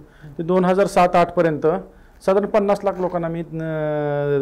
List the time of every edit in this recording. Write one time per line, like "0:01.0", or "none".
none